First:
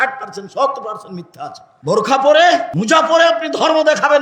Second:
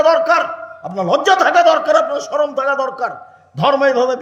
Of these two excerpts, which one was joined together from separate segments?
first; 2 cuts; at 1.7 s, 2.7 s

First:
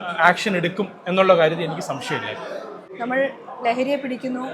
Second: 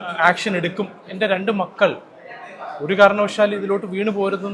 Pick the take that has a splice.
second; 1 cut; at 1.0 s

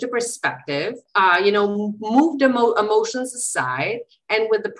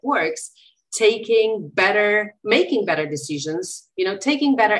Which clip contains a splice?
first; 1 cut; at 1.0 s

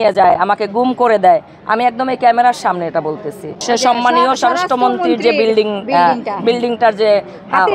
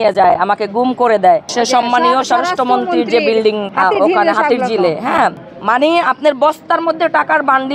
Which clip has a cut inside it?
second; 3 cuts; at 1.5 s, 3.7 s, 5.5 s

